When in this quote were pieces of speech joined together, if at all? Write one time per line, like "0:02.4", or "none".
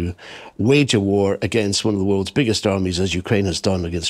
none